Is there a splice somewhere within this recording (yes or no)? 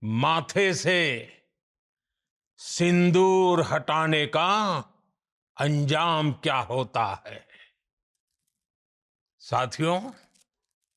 no